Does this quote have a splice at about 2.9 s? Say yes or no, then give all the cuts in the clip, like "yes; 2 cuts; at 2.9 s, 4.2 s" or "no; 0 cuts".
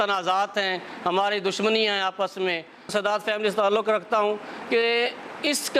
yes; 1 cut; at 2.9 s